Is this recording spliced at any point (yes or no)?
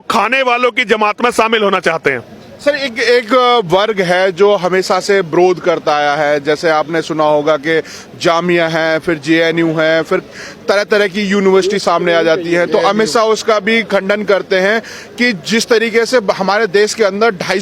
no